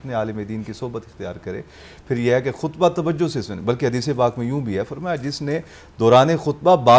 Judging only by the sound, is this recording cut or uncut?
uncut